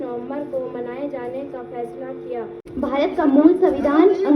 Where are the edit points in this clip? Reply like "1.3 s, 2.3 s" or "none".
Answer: 2.6 s